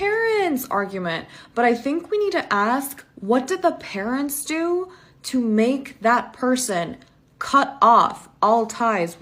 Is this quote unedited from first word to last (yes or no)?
yes